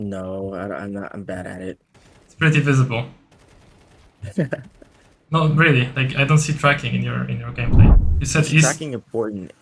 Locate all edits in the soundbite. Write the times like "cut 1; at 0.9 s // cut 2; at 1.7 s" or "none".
cut 1; at 8.0 s